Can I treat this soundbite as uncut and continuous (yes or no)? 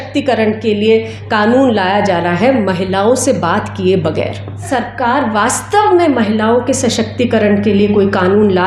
no